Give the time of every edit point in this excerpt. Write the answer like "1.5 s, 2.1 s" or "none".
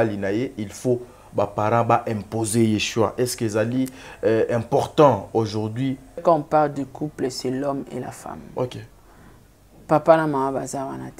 6.2 s